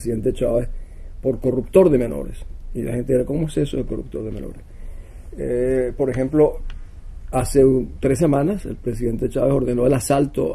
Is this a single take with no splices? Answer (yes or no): yes